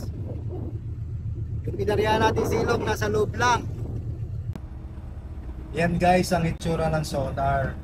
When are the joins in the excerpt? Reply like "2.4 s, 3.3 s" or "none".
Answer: 4.5 s